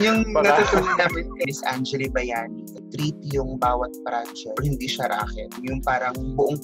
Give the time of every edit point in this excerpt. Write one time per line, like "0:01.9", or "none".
0:01.5
0:02.8
0:04.6
0:05.6